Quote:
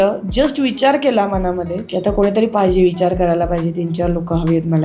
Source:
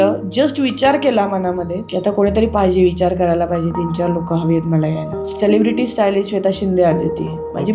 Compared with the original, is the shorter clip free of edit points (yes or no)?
yes